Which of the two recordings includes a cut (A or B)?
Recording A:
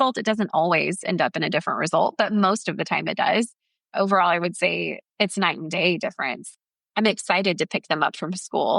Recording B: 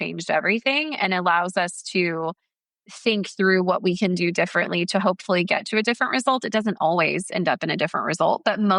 A